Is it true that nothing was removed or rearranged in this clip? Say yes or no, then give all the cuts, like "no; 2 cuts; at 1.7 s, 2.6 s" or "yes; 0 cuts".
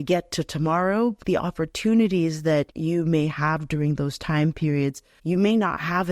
no; 3 cuts; at 1.2 s, 2.7 s, 5.1 s